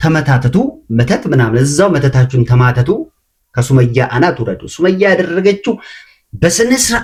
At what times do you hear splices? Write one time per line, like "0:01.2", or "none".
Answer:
none